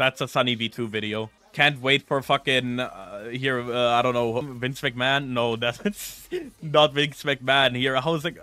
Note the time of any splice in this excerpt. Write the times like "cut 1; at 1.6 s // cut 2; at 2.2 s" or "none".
cut 1; at 1.4 s // cut 2; at 4.5 s

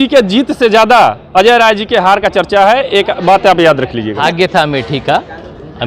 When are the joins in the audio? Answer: cut 1; at 4.2 s

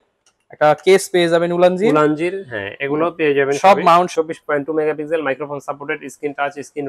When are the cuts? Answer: cut 1; at 4.1 s

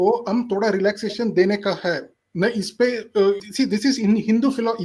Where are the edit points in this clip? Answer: cut 1; at 3.5 s

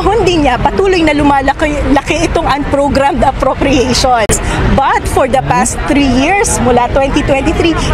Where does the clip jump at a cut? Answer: cut 1; at 4.3 s

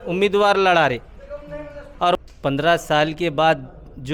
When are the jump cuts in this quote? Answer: cut 1; at 2.2 s

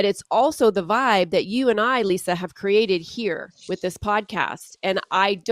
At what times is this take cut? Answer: cut 1; at 3.5 s

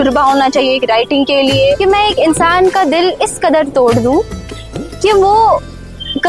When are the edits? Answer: cut 1; at 1.8 s

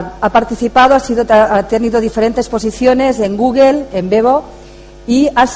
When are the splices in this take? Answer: cut 1; at 4.5 s

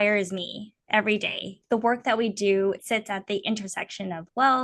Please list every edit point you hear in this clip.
cut 1; at 1.5 s // cut 2; at 2.8 s

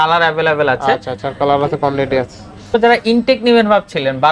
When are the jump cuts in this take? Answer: cut 1; at 2.7 s

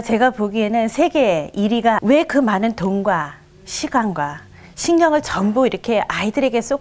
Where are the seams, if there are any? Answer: cut 1; at 2.0 s

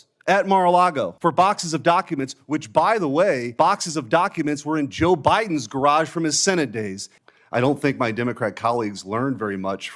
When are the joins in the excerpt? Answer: cut 1; at 1.1 s // cut 2; at 3.5 s // cut 3; at 7.1 s

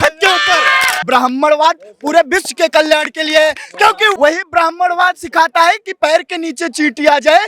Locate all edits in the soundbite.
cut 1; at 0.9 s // cut 2; at 4.1 s

